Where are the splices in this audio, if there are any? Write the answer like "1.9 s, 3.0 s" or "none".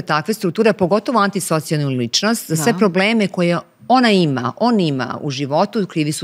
none